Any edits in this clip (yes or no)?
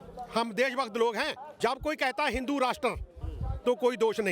yes